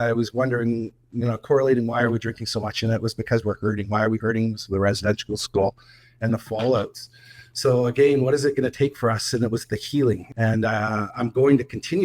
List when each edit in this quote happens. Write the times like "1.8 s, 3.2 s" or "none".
10.3 s